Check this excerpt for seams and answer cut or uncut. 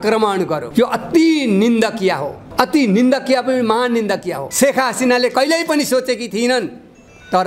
cut